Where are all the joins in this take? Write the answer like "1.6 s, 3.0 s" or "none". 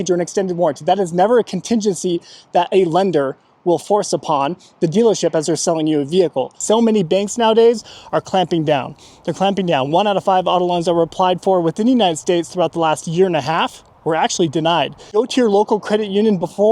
6.6 s, 15.0 s